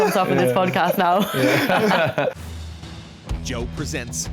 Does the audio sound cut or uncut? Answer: cut